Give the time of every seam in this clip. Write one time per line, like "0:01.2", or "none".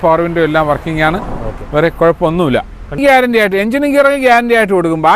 0:03.0

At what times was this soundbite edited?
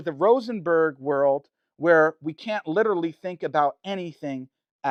none

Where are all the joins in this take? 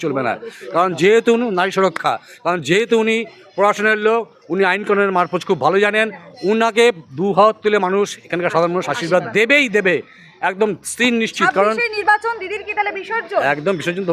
none

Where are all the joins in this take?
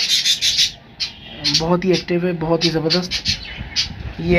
none

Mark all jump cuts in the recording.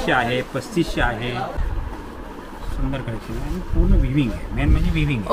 0:01.6

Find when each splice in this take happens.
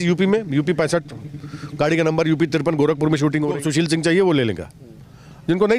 0:03.6

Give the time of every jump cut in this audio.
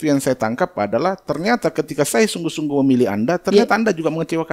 none

